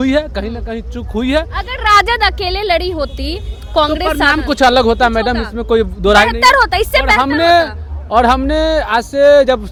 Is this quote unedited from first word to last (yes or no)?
yes